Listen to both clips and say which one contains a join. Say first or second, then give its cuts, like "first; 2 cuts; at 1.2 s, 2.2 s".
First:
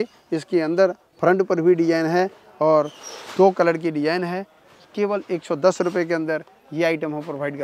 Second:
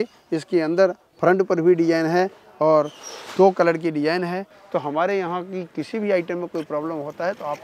second; 1 cut; at 4.6 s